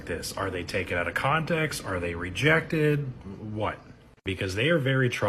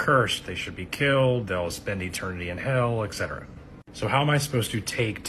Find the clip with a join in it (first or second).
second